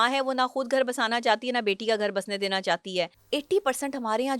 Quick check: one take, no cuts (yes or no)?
no